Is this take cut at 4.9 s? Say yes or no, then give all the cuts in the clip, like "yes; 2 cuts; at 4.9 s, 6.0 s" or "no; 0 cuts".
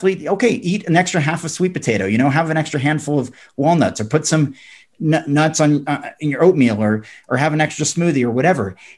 no; 0 cuts